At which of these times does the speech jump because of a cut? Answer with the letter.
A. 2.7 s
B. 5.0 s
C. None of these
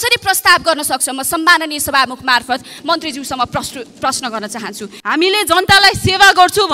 B